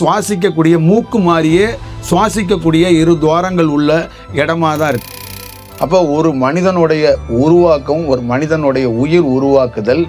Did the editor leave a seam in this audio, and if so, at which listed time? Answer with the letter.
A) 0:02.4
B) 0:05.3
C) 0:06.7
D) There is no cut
B